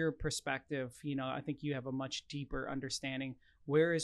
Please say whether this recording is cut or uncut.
uncut